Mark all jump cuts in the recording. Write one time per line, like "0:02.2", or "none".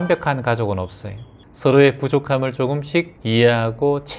0:03.2